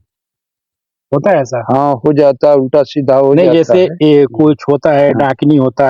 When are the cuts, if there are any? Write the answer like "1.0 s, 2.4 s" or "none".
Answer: 3.4 s